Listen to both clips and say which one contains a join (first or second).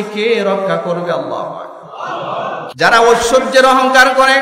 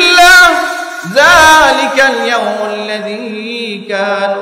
first